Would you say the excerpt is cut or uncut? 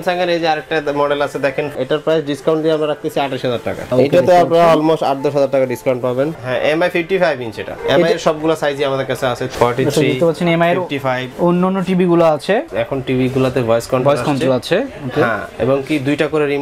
cut